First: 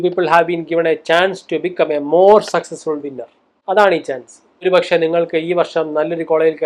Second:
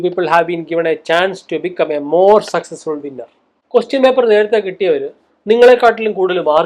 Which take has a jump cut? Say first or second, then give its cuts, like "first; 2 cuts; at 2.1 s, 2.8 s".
second; 1 cut; at 3.5 s